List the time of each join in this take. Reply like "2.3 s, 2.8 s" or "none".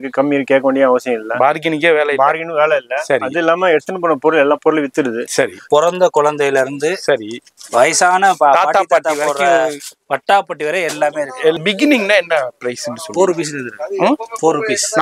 5.6 s, 11.6 s